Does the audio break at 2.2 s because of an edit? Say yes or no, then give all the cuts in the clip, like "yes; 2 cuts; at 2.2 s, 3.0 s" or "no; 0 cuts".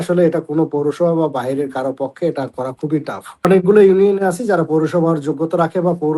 no; 1 cut; at 3.5 s